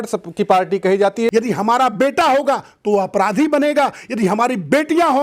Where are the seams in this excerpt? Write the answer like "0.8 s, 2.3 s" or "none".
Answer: 1.3 s